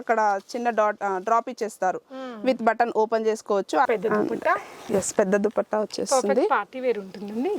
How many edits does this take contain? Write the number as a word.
one